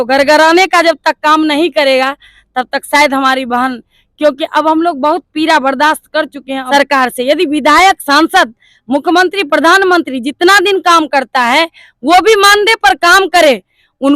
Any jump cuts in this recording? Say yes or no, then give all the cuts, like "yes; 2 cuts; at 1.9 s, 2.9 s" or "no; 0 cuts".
yes; 1 cut; at 6.6 s